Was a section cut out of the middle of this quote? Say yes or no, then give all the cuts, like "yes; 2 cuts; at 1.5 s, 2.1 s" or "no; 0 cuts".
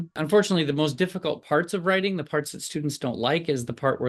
no; 0 cuts